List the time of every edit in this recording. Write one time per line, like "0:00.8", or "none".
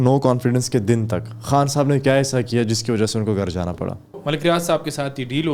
0:04.2